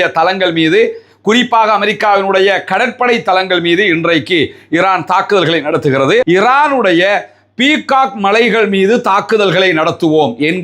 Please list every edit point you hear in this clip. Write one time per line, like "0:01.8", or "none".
0:06.2